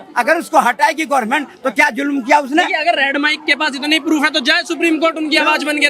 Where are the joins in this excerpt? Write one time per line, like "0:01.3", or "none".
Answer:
none